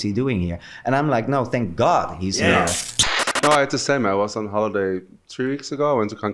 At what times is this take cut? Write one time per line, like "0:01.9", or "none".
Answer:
0:03.0